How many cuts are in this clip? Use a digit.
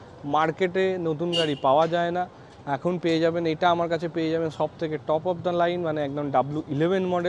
0